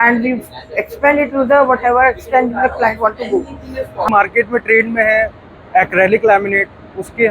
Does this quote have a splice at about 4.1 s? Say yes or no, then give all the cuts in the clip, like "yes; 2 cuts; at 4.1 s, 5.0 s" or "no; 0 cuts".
yes; 1 cut; at 4.1 s